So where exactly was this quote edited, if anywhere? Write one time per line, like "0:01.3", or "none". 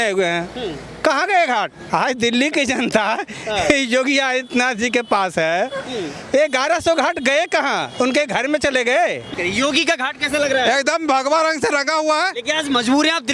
0:01.8
0:09.3